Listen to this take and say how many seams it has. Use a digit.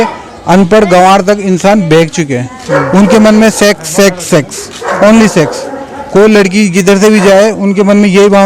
0